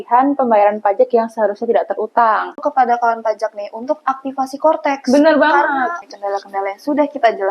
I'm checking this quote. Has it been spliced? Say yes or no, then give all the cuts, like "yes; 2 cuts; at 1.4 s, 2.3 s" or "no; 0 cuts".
yes; 2 cuts; at 2.6 s, 6.1 s